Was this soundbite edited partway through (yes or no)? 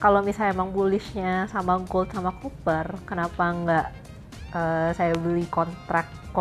no